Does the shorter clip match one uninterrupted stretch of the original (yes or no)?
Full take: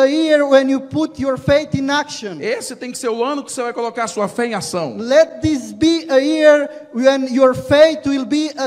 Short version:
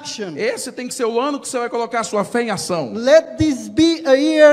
yes